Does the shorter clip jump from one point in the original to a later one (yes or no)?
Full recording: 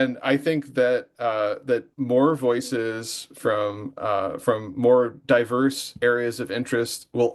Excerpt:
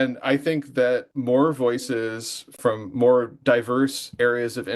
yes